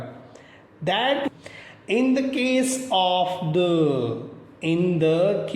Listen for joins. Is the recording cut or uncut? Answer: cut